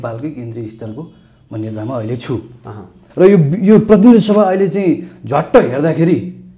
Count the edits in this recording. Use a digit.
1